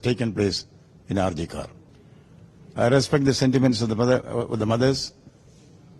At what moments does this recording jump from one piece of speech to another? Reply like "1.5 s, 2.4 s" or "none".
1.8 s